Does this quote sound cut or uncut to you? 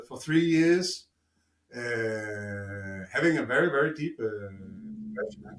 uncut